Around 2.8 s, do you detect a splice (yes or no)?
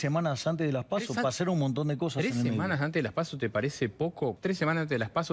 no